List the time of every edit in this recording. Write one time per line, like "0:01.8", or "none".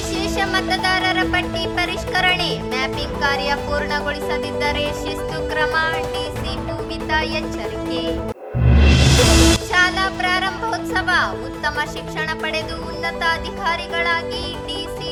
none

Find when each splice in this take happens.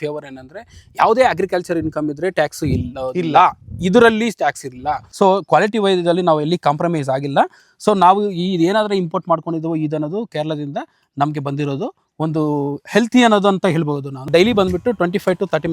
0:05.0
0:14.3

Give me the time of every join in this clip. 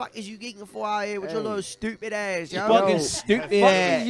none

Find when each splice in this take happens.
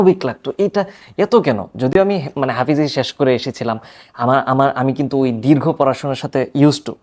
none

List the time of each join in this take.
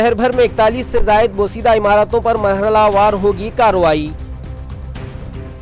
none

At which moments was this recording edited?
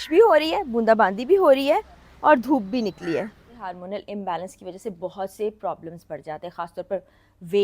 0:03.7

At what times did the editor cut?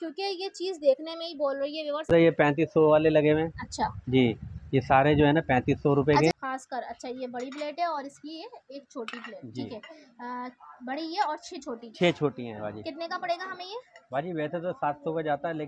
0:02.1
0:06.3

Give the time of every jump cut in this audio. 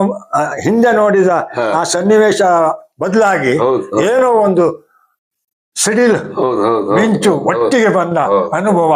none

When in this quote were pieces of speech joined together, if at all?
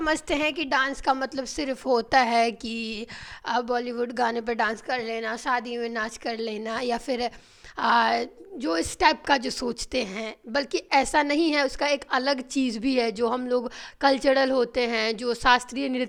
none

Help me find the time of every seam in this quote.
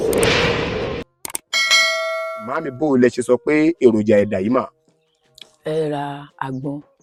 none

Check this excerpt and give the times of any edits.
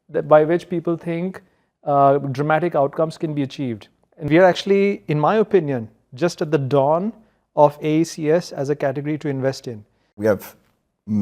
0:04.2
0:10.1

